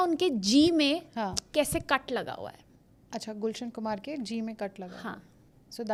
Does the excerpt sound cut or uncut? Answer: uncut